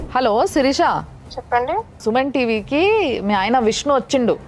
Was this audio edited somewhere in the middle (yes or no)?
no